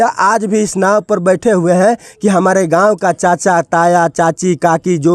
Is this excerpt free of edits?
yes; 0 cuts

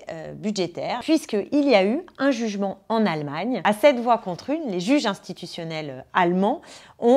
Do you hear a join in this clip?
yes; 2 cuts; at 1.0 s, 3.6 s

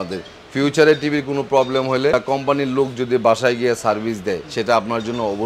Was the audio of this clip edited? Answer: yes; 2 cuts; at 2.1 s, 4.5 s

